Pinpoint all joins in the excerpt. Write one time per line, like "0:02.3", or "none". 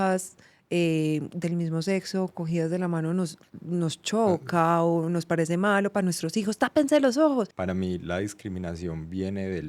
0:07.6